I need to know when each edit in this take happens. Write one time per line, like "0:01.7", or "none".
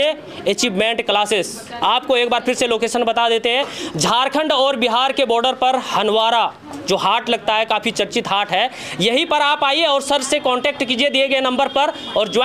none